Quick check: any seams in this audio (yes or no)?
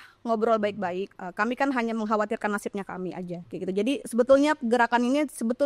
yes